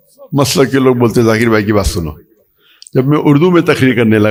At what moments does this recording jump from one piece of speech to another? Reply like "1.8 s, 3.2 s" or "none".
none